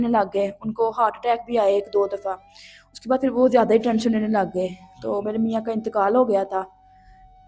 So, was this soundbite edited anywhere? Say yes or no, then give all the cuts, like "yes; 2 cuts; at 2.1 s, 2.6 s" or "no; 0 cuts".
no; 0 cuts